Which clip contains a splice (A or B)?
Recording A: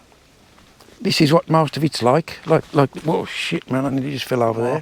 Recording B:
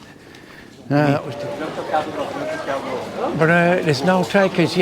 B